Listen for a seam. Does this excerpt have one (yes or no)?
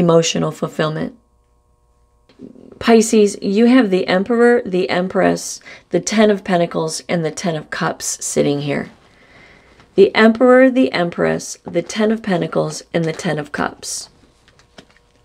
yes